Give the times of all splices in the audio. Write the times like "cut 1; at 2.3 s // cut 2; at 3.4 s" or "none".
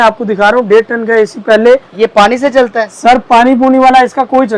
none